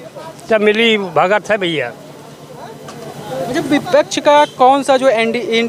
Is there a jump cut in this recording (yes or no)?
no